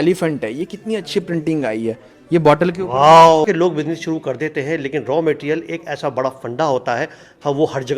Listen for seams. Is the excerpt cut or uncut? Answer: cut